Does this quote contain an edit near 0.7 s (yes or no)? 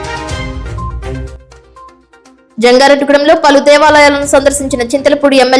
yes